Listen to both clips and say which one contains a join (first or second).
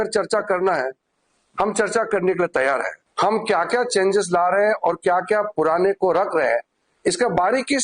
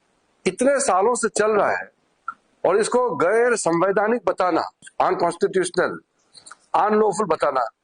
first